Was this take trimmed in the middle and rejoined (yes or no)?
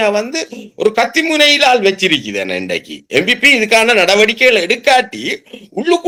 no